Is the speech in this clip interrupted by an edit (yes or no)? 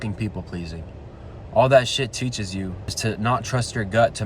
yes